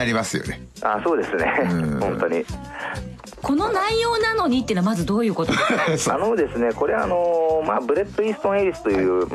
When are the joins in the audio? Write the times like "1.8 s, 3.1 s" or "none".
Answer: 6.5 s